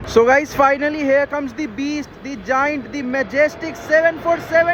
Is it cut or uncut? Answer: uncut